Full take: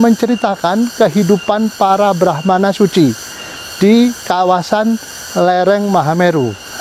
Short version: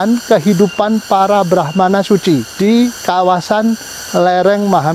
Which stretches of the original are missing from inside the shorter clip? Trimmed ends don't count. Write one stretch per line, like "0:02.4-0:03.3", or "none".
0:03.2-0:03.7